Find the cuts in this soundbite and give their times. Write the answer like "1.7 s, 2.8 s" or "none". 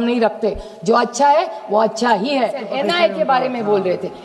2.6 s